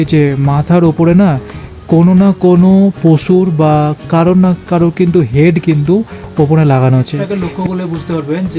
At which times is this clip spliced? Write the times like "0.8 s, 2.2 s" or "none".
7.2 s